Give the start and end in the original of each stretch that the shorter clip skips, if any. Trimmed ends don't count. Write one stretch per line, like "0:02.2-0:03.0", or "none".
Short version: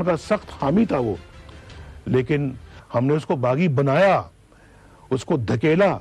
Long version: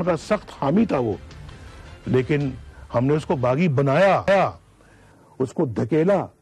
0:04.2-0:04.5